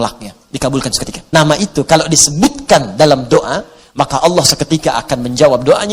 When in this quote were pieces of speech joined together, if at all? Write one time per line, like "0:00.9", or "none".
0:01.1